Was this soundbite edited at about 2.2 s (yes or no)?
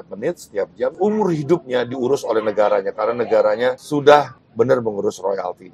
no